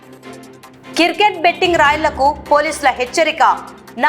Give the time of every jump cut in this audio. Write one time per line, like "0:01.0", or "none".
0:00.9

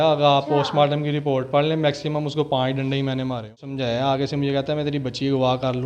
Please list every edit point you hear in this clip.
0:03.6

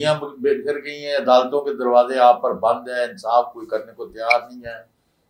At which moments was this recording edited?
none

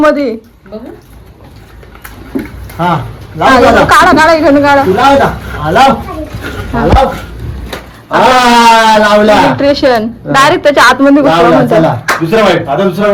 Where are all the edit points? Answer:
none

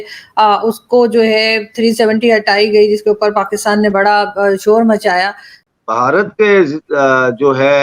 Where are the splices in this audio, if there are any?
0:05.6

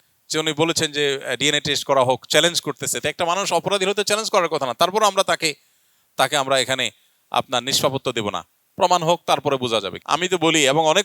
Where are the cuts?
0:09.9

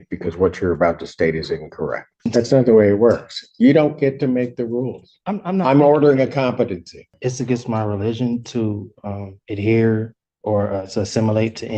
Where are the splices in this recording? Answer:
0:02.1
0:07.1

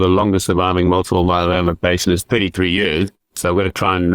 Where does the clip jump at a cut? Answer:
0:03.2

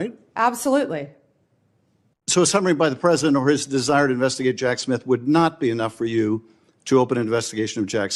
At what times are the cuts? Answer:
none

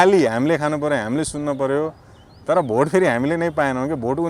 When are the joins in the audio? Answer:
none

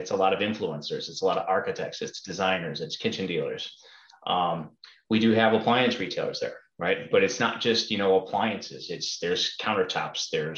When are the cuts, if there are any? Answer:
none

